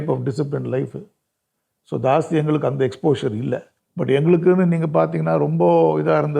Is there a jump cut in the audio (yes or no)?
yes